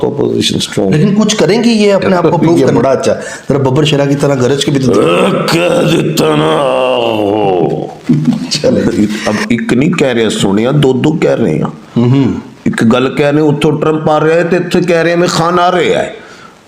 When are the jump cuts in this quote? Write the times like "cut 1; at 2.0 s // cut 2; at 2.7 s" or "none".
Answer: cut 1; at 2.6 s // cut 2; at 8.9 s